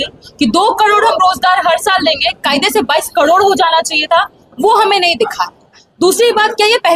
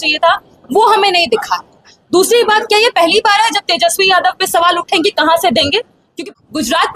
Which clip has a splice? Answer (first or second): second